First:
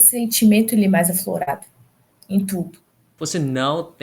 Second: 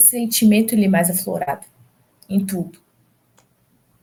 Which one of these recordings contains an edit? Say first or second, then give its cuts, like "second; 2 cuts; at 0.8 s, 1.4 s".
first; 1 cut; at 3.0 s